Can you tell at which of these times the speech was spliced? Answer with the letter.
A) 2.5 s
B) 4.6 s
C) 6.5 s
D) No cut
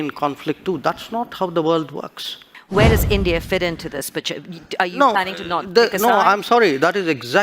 A